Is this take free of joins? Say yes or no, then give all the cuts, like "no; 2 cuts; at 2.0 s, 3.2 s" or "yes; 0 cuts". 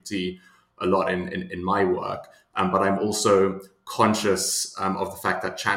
yes; 0 cuts